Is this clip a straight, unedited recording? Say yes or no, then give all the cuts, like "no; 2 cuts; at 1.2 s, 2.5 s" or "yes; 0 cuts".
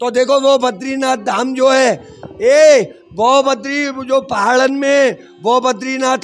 yes; 0 cuts